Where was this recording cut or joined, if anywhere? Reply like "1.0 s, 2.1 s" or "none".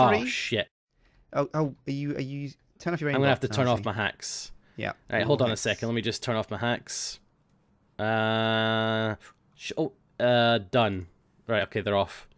2.3 s